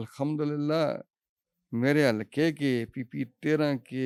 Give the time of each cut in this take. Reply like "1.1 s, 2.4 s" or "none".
none